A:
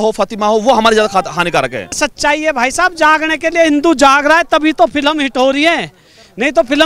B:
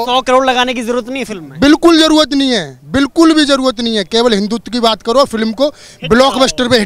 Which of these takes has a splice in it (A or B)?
A